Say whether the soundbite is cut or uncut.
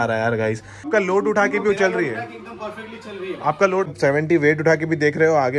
cut